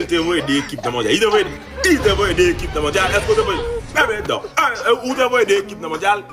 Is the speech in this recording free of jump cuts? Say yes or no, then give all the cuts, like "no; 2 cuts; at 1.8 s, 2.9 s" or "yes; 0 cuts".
yes; 0 cuts